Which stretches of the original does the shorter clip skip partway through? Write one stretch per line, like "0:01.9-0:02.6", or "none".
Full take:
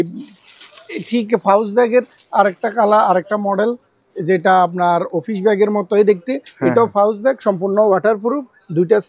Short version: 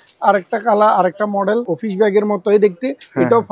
0:03.9-0:05.2